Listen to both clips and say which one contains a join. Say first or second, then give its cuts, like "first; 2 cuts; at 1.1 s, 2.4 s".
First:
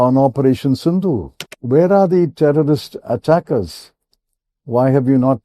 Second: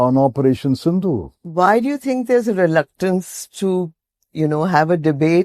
first; 1 cut; at 1.4 s